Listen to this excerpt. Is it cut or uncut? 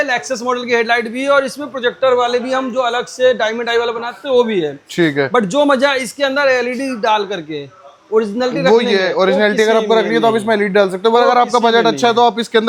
uncut